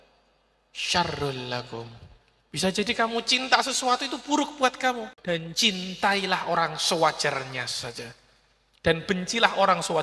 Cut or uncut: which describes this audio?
cut